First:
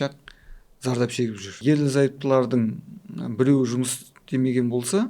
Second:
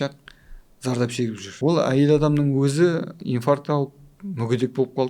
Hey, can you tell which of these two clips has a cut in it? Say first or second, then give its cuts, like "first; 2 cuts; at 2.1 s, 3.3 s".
second; 2 cuts; at 1.5 s, 3.2 s